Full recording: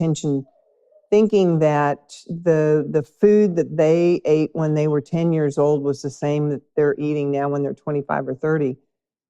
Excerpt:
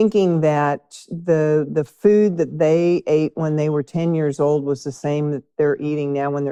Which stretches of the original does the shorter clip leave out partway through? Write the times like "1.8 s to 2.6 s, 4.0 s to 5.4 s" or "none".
none